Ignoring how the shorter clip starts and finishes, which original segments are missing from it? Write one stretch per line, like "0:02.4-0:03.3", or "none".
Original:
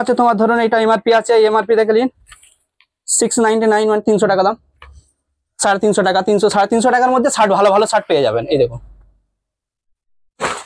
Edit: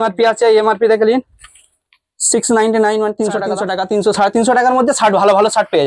0:04.4-0:05.9